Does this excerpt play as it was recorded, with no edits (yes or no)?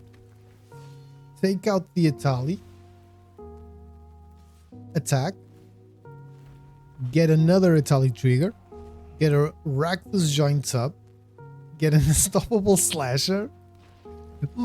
no